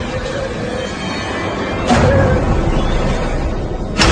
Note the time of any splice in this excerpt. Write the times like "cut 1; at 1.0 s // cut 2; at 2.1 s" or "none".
none